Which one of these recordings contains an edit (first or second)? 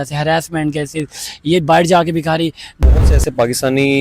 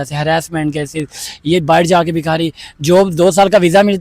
first